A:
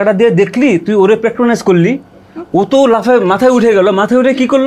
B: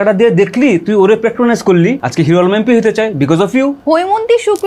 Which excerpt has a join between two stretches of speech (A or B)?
B